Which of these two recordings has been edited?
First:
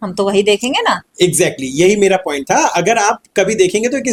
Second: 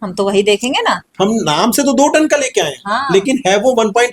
second; 1 cut; at 1.1 s

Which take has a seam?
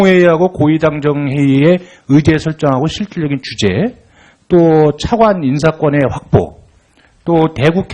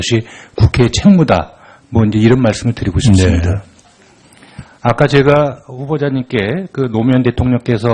first; 1 cut; at 3.5 s

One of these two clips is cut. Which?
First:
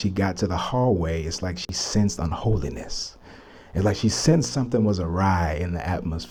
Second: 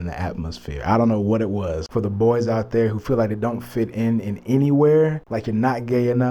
second; 2 cuts; at 1.8 s, 5.3 s

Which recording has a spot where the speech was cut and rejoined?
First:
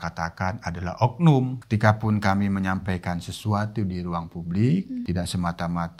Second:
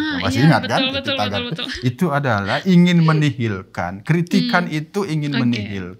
first; 2 cuts; at 1.6 s, 5.0 s

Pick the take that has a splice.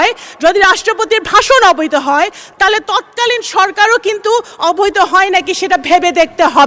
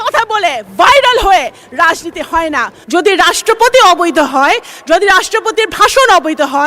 second; 1 cut; at 2.7 s

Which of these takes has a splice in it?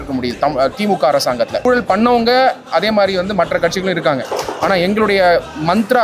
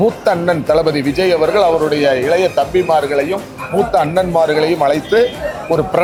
first; 1 cut; at 1.6 s

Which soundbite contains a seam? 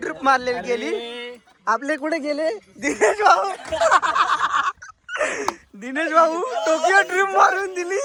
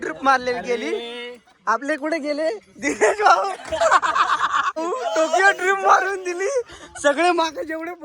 second; 1 cut; at 4.8 s

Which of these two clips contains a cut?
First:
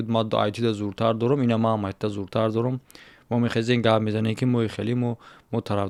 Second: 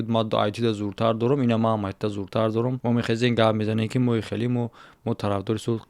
second; 1 cut; at 2.8 s

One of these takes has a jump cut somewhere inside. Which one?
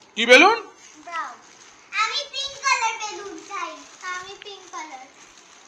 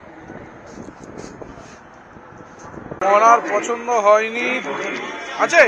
second; 1 cut; at 3.0 s

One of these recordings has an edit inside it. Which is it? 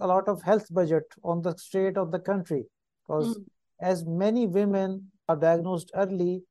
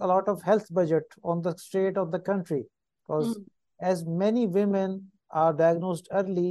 first; 1 cut; at 5.3 s

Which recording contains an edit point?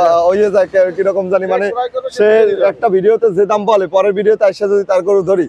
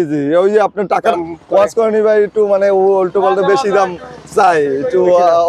second; 1 cut; at 1.1 s

